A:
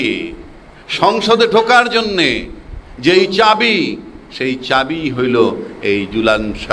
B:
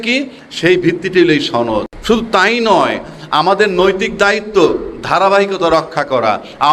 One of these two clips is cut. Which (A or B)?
B